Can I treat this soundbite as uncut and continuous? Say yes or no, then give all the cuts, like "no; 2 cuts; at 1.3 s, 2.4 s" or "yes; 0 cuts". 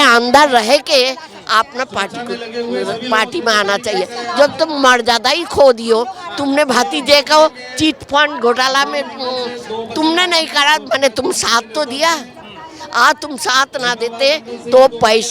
yes; 0 cuts